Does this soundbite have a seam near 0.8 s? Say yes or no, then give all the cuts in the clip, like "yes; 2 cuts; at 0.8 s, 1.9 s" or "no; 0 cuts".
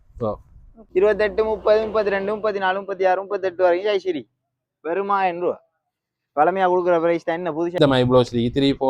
yes; 2 cuts; at 0.8 s, 7.8 s